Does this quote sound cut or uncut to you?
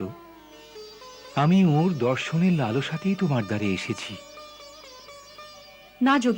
uncut